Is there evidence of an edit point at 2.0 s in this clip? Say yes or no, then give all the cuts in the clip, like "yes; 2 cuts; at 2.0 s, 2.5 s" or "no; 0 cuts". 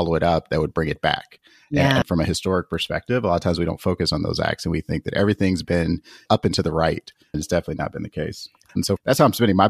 yes; 2 cuts; at 2.0 s, 8.8 s